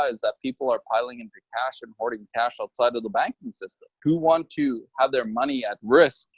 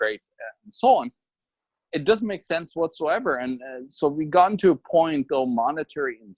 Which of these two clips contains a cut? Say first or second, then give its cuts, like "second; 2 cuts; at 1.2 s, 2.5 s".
first; 1 cut; at 4.0 s